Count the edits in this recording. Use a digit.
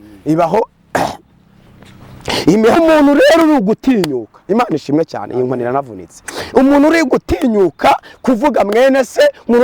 1